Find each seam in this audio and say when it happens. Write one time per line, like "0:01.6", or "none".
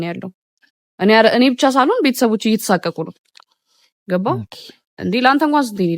none